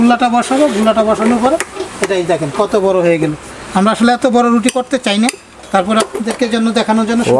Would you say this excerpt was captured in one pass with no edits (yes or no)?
yes